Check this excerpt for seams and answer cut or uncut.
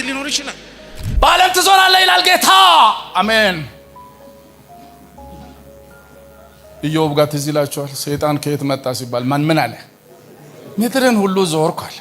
cut